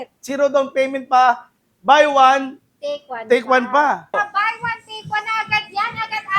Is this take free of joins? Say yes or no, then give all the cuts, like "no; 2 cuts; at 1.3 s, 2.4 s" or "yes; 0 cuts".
no; 1 cut; at 4.1 s